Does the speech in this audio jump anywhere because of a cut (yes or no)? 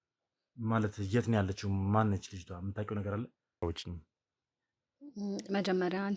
yes